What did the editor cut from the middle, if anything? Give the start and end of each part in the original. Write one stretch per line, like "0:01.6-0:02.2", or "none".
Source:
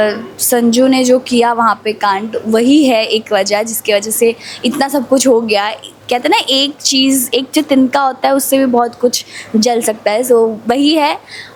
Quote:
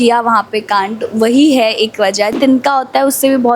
0:03.7-0:07.7